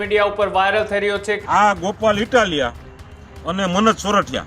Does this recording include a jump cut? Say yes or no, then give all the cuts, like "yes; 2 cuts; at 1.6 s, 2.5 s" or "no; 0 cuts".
yes; 1 cut; at 1.3 s